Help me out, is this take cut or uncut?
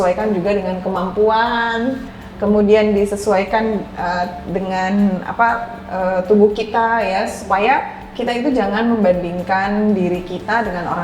uncut